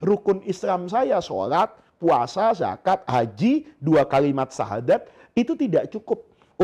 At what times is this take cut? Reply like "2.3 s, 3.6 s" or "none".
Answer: none